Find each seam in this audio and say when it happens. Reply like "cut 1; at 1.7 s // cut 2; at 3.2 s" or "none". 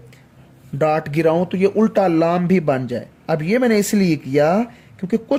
none